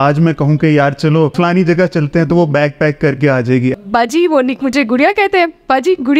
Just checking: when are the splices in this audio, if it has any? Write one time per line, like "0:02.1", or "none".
0:01.3
0:03.7